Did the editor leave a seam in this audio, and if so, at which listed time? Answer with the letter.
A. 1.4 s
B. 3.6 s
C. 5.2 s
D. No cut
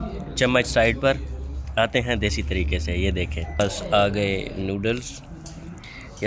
B